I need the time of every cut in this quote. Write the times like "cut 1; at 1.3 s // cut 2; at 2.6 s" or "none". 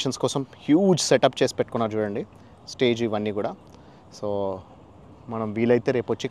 none